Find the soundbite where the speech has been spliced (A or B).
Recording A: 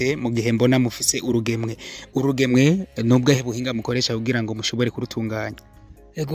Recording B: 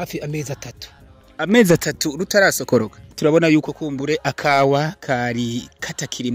B